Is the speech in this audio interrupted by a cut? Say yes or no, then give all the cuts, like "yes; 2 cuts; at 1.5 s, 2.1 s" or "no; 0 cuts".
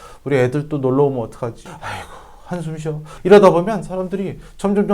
yes; 1 cut; at 1.6 s